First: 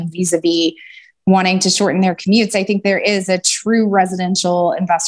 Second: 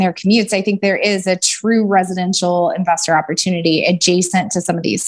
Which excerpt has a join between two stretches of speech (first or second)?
first